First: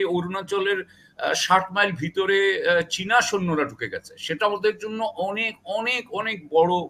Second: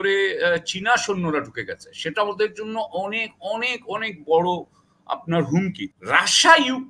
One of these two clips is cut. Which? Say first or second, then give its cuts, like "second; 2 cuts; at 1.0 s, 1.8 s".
second; 1 cut; at 5.8 s